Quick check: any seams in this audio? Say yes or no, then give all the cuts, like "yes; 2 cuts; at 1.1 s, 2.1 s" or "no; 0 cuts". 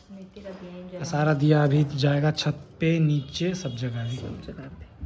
no; 0 cuts